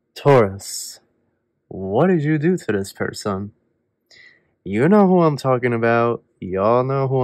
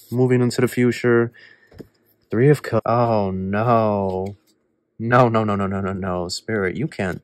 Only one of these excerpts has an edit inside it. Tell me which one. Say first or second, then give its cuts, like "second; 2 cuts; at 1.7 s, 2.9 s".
second; 1 cut; at 2.8 s